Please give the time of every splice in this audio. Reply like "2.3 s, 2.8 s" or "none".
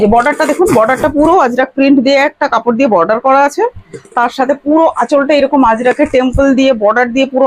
none

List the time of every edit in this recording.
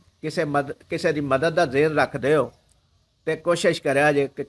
none

